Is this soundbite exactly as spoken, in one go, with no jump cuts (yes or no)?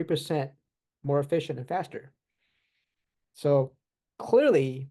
yes